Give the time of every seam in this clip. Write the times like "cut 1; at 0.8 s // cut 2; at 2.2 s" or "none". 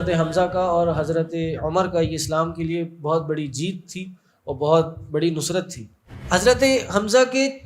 cut 1; at 6.2 s